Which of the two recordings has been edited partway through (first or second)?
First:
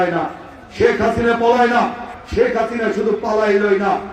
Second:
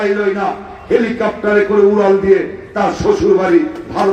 first